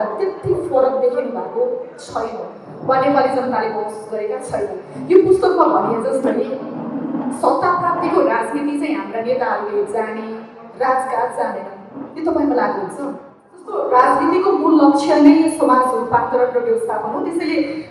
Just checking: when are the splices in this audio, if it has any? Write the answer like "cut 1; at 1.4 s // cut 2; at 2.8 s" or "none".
cut 1; at 13.8 s